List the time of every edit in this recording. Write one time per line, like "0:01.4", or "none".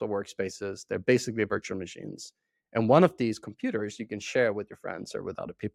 none